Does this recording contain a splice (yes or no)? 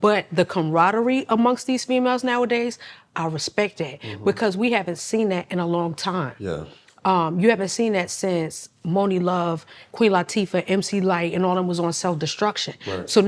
no